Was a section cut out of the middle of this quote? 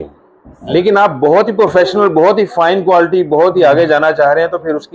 no; 0 cuts

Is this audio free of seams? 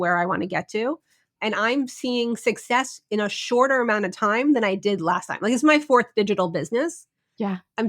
no; 1 cut; at 1.3 s

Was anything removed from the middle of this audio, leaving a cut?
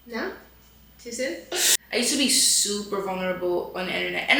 yes; 1 cut; at 1.7 s

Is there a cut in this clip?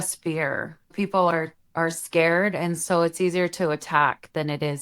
yes; 1 cut; at 0.9 s

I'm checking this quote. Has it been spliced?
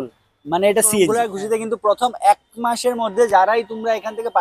yes; 1 cut; at 1.2 s

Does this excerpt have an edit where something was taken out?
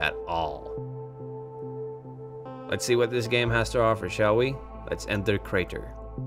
no; 0 cuts

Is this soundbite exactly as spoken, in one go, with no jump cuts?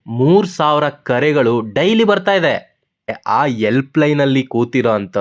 no; 1 cut; at 3.1 s

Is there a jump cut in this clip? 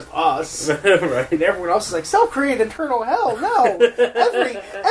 no; 0 cuts

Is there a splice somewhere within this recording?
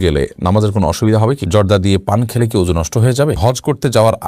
yes; 2 cuts; at 1.4 s, 3.4 s

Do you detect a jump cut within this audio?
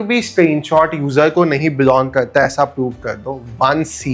no; 0 cuts

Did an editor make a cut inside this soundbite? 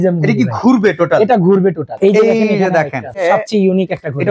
yes; 2 cuts; at 1.9 s, 3.2 s

